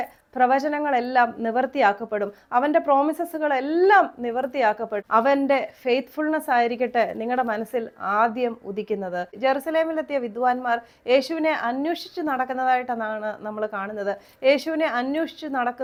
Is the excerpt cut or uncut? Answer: uncut